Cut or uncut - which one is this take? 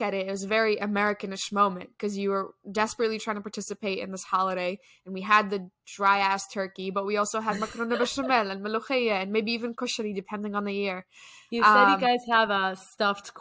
uncut